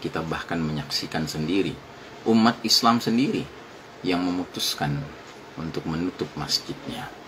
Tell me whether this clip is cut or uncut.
uncut